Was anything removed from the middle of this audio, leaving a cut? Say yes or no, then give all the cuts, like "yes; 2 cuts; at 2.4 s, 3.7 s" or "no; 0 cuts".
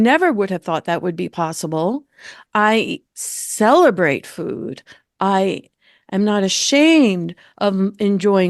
no; 0 cuts